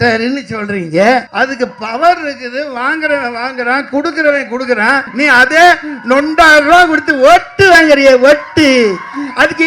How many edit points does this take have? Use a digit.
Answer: 2